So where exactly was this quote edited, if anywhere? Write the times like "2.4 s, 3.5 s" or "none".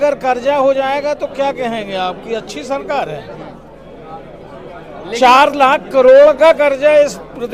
none